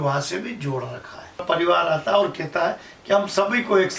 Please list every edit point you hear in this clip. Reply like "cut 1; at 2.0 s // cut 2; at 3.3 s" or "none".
cut 1; at 1.4 s